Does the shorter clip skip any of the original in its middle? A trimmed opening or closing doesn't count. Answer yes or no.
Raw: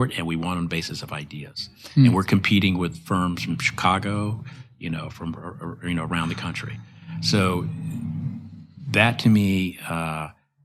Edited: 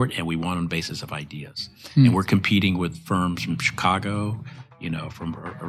no